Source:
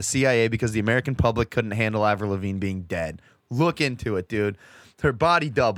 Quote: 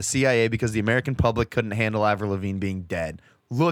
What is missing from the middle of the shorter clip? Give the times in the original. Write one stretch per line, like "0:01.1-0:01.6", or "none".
none